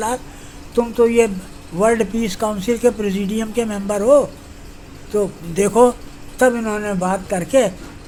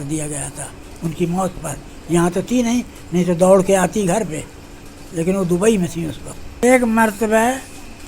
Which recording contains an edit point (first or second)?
second